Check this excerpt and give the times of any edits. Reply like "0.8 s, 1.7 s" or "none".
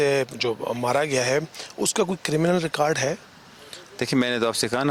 none